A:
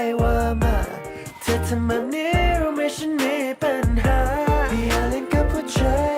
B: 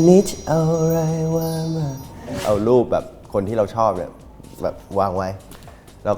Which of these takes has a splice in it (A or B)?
B